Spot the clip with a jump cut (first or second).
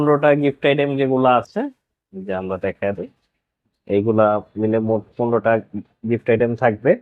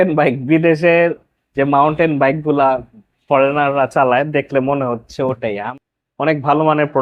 second